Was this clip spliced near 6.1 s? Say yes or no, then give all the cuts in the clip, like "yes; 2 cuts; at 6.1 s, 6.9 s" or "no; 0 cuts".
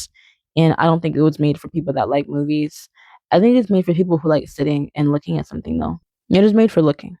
yes; 1 cut; at 6.1 s